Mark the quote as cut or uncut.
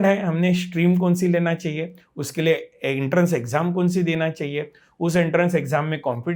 uncut